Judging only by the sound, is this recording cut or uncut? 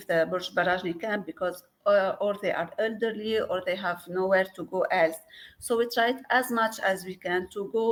uncut